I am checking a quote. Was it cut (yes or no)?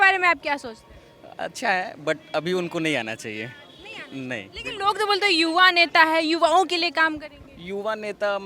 no